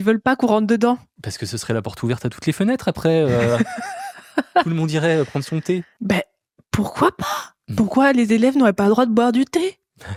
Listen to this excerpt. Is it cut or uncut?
uncut